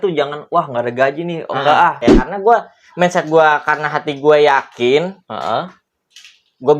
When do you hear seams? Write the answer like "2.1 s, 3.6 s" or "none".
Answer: 2.1 s